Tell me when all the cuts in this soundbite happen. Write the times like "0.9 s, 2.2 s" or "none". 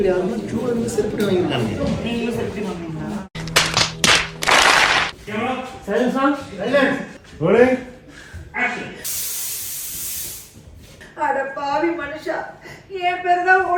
5.1 s